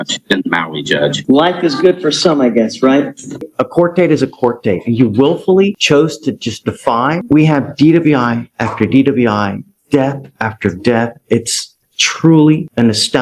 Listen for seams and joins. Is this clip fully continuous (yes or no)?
no